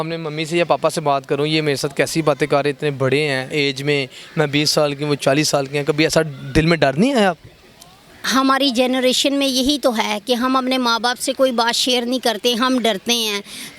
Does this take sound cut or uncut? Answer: uncut